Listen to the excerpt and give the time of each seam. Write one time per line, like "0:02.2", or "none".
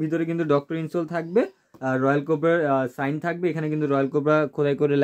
none